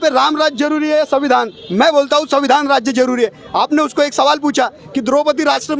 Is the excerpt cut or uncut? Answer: uncut